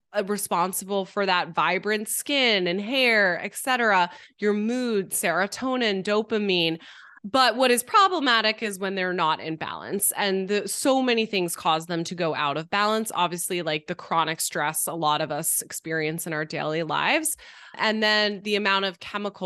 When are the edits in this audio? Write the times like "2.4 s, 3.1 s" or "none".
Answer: none